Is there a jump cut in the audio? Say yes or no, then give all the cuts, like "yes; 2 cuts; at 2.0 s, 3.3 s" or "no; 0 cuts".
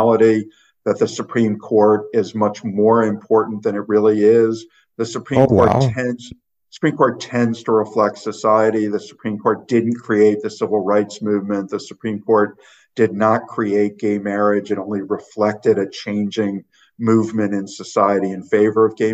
no; 0 cuts